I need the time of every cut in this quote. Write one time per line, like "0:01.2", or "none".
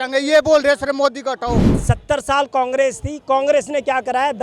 0:01.7